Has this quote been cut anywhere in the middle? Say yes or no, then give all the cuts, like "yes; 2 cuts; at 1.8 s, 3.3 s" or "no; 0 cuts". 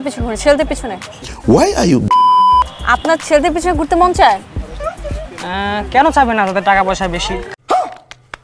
yes; 2 cuts; at 2.8 s, 7.4 s